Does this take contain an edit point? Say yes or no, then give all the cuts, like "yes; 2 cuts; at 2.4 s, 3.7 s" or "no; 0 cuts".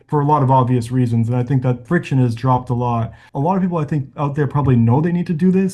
yes; 2 cuts; at 1.8 s, 3.2 s